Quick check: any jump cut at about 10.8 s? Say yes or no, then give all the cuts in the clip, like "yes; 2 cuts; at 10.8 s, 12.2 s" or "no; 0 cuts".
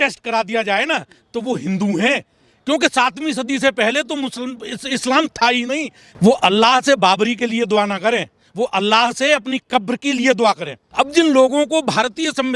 yes; 2 cuts; at 6.0 s, 10.8 s